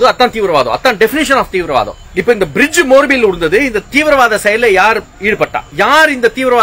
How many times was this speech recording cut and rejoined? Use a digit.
2